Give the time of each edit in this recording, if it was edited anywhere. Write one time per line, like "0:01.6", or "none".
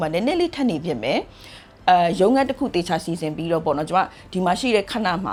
none